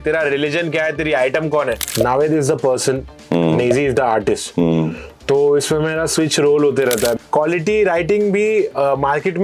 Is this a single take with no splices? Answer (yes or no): no